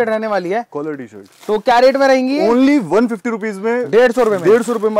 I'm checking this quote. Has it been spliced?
no; 0 cuts

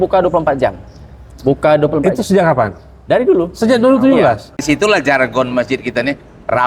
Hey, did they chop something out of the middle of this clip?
yes; 1 cut; at 4.6 s

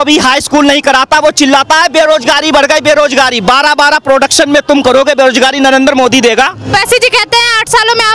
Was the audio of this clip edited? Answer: yes; 1 cut; at 6.7 s

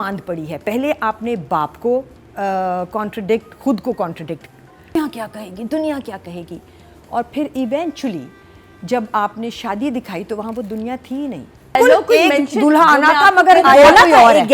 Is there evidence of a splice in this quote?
yes; 2 cuts; at 5.0 s, 11.8 s

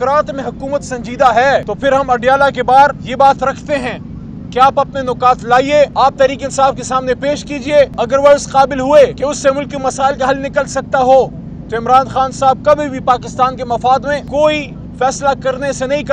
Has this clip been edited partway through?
yes; 6 cuts; at 1.7 s, 3.0 s, 5.9 s, 7.9 s, 9.2 s, 14.3 s

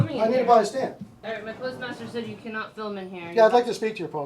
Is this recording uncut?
no; 1 cut; at 1.1 s

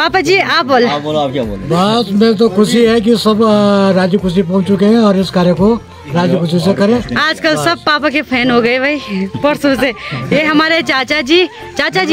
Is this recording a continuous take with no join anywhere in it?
yes; 0 cuts

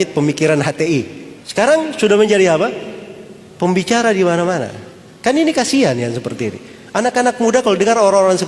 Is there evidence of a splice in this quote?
no; 0 cuts

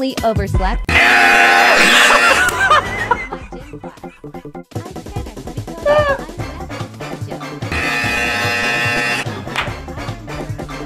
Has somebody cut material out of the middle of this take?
no; 0 cuts

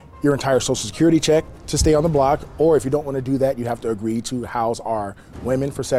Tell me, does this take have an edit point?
no; 0 cuts

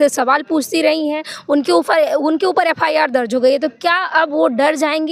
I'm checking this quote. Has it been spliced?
no; 0 cuts

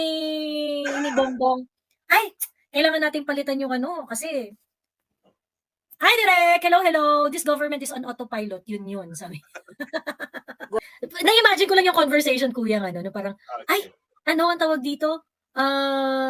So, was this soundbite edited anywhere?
yes; 1 cut; at 10.8 s

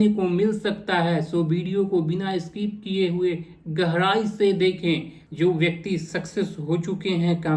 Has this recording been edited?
no; 0 cuts

